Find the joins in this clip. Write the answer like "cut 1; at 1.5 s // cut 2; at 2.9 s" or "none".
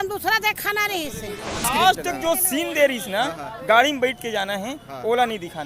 cut 1; at 1.6 s